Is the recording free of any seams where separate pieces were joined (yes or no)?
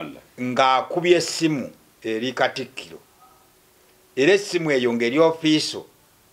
no